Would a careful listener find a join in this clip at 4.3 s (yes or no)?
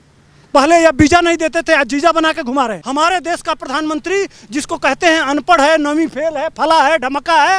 no